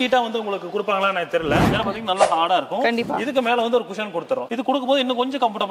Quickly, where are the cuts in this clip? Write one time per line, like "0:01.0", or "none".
0:01.7